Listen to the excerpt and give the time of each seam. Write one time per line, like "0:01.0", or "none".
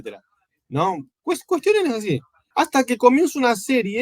0:02.3